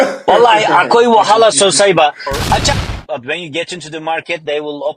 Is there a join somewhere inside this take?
yes; 1 cut; at 2.6 s

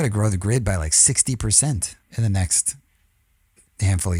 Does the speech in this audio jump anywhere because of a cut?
no; 0 cuts

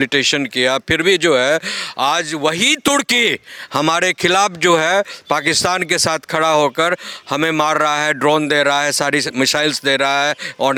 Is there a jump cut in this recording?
no; 0 cuts

